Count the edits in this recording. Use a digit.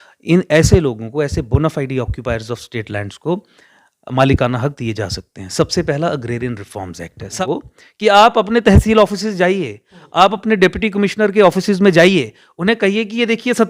1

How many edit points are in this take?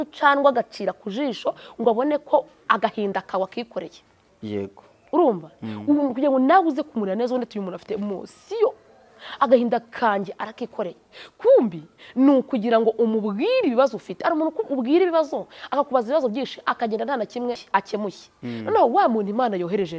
1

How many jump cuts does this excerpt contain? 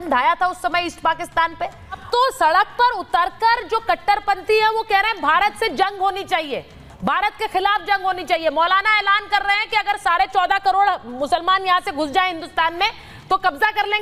1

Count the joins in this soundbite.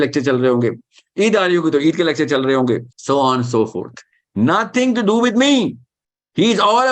1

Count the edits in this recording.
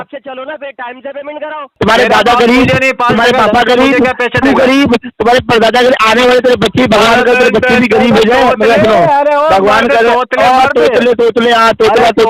1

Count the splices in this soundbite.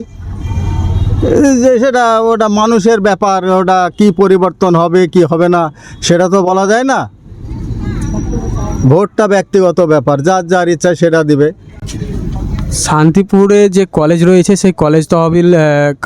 0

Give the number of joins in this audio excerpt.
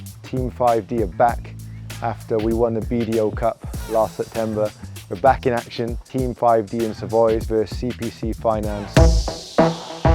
3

